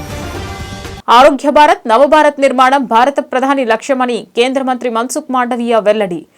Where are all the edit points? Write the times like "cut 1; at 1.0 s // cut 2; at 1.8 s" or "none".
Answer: none

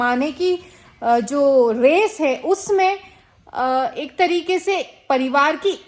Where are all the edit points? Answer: none

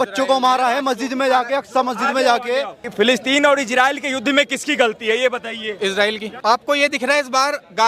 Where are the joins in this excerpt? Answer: cut 1; at 2.8 s // cut 2; at 6.3 s

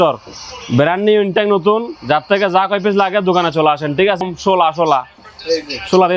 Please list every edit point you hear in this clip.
cut 1; at 4.2 s

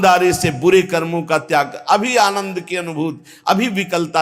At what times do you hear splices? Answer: none

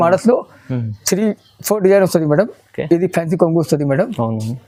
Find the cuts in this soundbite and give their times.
none

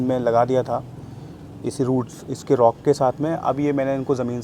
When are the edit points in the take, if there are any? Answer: none

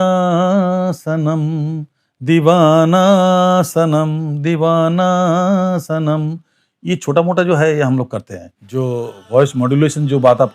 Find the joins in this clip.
cut 1; at 8.6 s

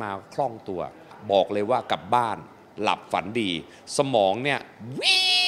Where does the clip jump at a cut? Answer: cut 1; at 1.1 s

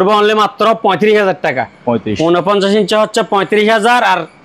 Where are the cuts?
none

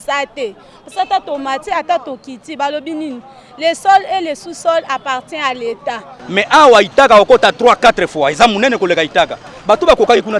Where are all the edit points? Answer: cut 1; at 6.1 s

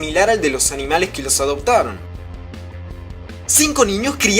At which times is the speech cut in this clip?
cut 1; at 3.4 s

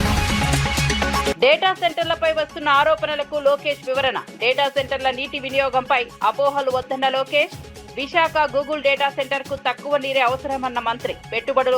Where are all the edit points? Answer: cut 1; at 1.3 s

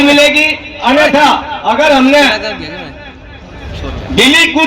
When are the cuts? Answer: none

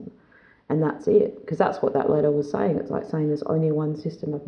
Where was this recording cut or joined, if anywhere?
none

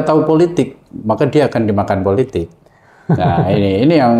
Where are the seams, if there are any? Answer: none

